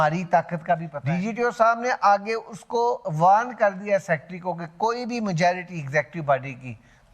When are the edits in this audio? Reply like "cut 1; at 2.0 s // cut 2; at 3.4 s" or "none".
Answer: cut 1; at 1.0 s